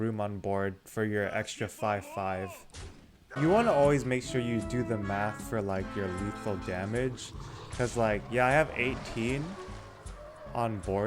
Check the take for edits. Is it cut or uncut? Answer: cut